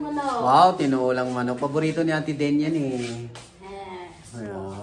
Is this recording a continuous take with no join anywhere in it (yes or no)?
yes